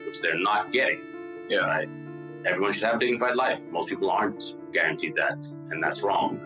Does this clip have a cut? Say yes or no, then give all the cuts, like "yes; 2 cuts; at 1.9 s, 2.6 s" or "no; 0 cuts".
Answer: yes; 1 cut; at 2.3 s